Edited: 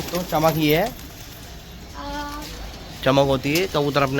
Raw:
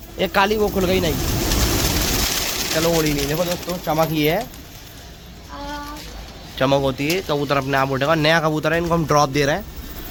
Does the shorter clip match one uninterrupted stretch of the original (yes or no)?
yes